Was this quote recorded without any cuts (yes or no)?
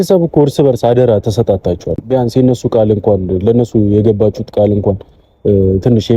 no